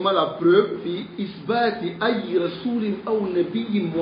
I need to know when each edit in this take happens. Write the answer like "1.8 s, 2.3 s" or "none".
1.1 s